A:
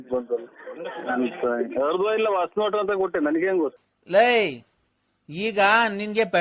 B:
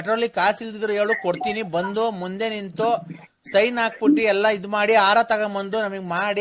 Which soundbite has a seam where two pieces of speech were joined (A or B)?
A